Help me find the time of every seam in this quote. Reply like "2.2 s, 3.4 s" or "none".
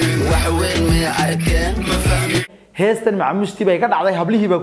2.6 s